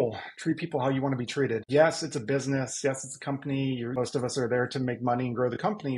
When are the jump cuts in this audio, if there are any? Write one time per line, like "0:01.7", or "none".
0:01.6
0:03.9